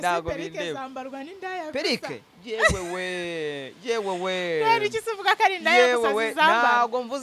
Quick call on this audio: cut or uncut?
uncut